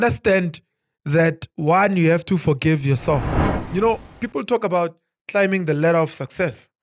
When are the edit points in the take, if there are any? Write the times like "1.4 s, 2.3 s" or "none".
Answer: 3.6 s